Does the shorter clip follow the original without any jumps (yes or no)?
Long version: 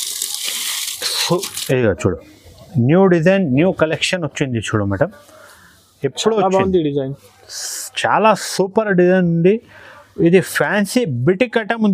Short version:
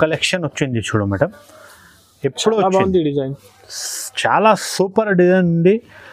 yes